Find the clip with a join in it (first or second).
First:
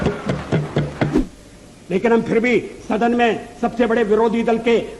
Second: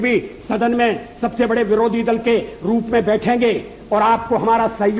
first